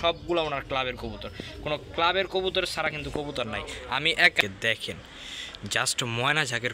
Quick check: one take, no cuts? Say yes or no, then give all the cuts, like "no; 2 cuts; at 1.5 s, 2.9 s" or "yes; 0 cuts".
no; 1 cut; at 4.4 s